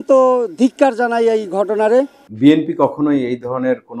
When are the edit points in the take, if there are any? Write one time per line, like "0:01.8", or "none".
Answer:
0:02.2